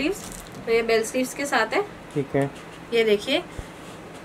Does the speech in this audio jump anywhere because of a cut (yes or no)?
yes